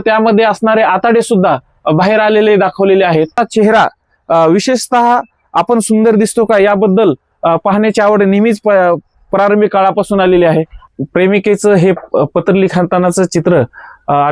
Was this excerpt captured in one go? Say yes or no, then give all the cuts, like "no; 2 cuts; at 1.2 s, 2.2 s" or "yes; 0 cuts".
no; 2 cuts; at 3.4 s, 10.8 s